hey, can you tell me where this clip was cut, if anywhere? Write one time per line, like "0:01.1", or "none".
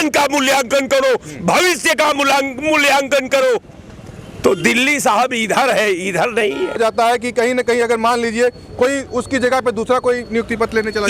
none